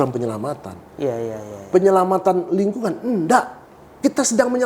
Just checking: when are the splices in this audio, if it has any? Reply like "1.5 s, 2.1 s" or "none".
none

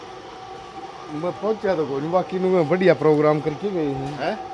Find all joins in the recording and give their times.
none

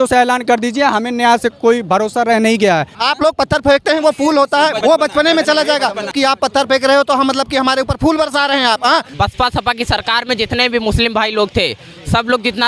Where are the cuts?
2.9 s, 4.8 s, 6.1 s, 9.1 s

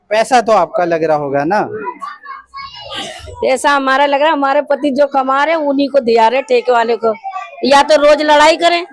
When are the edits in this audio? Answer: none

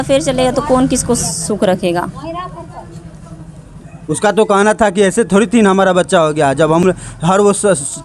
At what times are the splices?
6.8 s

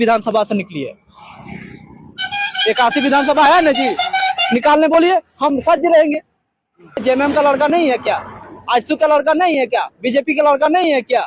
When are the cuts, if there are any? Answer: 7.0 s

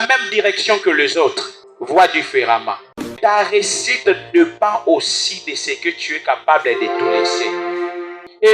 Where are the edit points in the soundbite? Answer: 3.0 s

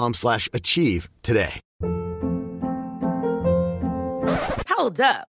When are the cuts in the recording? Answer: 1.6 s

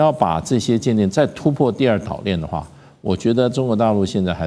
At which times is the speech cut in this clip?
none

